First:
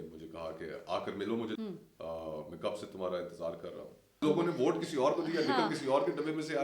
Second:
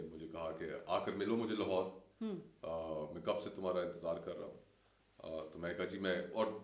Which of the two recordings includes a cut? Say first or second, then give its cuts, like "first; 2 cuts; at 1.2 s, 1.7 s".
first; 2 cuts; at 1.6 s, 4.0 s